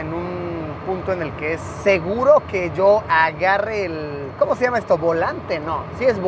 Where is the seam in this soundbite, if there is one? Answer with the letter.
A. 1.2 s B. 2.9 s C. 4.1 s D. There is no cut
D